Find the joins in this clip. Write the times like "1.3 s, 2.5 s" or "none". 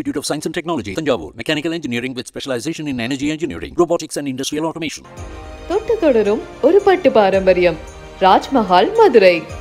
none